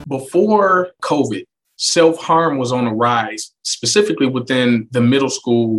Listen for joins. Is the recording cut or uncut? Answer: cut